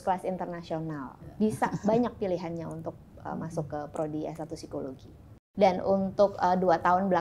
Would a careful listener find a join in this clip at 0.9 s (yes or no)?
yes